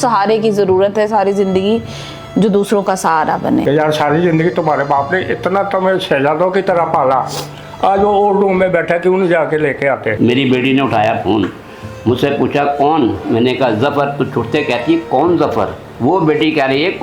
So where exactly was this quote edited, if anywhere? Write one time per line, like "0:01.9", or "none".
0:03.6
0:10.1